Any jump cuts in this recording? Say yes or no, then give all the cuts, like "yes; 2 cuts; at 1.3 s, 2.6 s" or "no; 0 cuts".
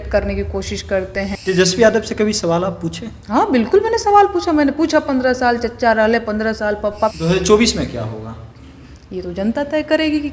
yes; 2 cuts; at 1.3 s, 7.1 s